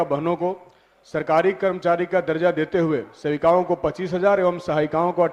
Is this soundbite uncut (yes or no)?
yes